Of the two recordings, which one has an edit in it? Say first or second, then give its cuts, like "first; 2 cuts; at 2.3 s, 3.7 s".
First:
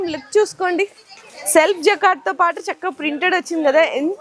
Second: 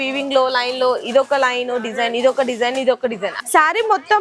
second; 1 cut; at 3.3 s